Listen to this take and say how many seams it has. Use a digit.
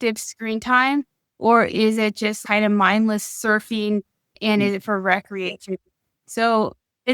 0